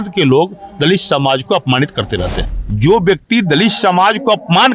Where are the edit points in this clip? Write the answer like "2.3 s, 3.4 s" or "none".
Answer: 2.4 s